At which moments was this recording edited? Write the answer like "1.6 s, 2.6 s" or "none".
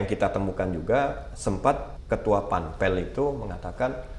1.4 s